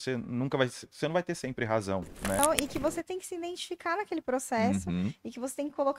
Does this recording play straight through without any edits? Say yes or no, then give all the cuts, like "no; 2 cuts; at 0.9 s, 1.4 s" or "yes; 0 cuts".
no; 1 cut; at 2.4 s